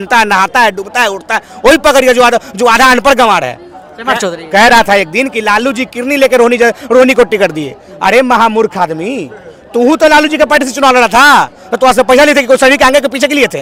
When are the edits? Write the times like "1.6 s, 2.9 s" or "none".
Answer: none